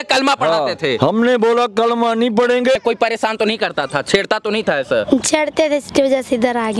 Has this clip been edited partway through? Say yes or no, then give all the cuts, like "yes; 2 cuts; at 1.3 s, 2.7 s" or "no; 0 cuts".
yes; 1 cut; at 2.8 s